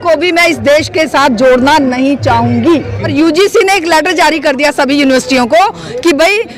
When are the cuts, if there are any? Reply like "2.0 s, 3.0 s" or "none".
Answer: 3.1 s

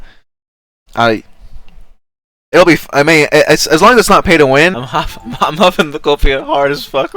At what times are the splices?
4.9 s

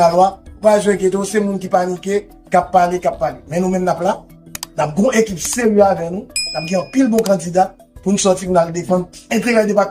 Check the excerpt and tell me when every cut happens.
none

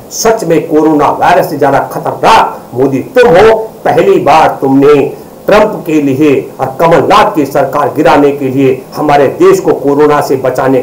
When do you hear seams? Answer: none

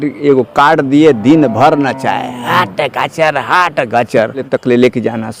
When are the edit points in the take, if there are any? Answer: 4.4 s

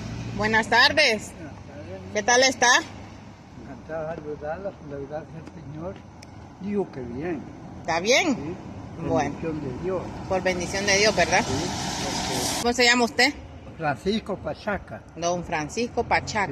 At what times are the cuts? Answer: 12.6 s

